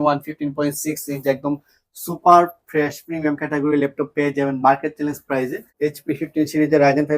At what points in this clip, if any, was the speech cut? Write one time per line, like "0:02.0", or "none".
0:05.6